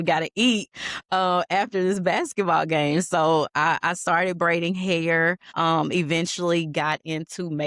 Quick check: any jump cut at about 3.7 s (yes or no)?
no